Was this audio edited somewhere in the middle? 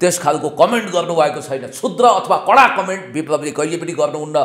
no; 0 cuts

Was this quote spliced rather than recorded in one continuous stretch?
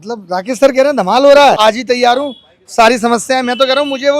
yes; 1 cut; at 1.6 s

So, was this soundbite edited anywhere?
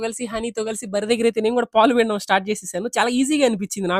no; 0 cuts

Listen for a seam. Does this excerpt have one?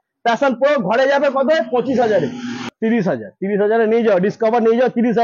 yes; 1 cut; at 2.6 s

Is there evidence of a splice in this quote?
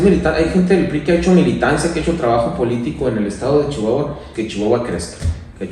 yes; 1 cut; at 4.3 s

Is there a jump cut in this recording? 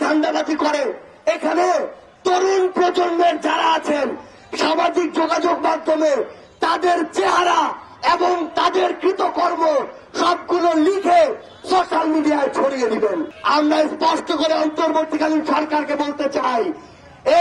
yes; 1 cut; at 13.3 s

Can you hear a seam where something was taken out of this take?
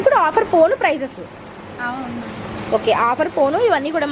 no; 0 cuts

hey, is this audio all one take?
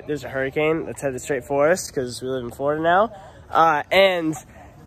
yes; 0 cuts

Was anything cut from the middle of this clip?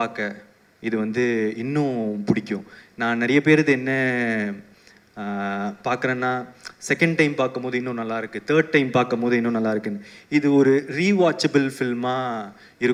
no; 0 cuts

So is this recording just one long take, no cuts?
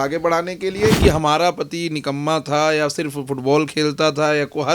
no; 1 cut; at 1.0 s

